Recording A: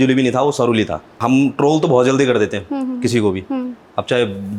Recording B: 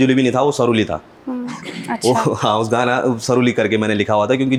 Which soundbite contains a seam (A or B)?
A